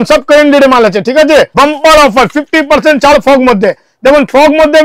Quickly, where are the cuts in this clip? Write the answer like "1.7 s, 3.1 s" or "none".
1.5 s